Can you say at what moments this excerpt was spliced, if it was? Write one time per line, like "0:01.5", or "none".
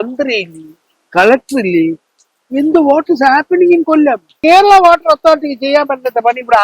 0:04.3